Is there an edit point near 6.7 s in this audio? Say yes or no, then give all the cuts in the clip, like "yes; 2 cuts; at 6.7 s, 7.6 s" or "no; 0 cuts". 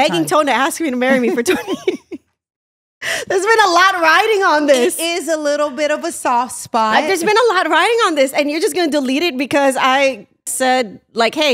no; 1 cut; at 10.5 s